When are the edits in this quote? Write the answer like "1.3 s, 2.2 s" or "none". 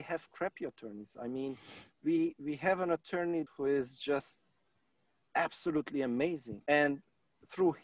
3.5 s, 6.6 s